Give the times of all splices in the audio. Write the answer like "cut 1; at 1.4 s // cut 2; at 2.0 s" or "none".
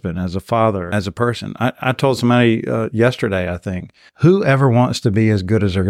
cut 1; at 0.9 s